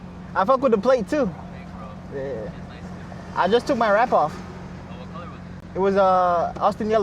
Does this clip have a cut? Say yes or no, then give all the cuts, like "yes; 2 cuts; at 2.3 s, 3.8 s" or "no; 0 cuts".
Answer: no; 0 cuts